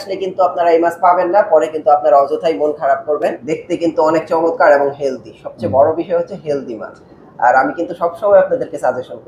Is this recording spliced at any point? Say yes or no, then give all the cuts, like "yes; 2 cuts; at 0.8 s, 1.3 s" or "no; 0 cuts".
yes; 1 cut; at 3.4 s